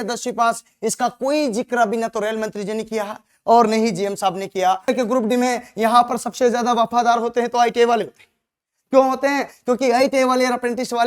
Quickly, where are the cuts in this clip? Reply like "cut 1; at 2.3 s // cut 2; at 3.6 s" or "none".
cut 1; at 4.9 s